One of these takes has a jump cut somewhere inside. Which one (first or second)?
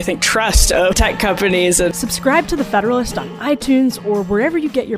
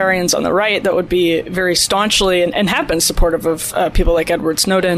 first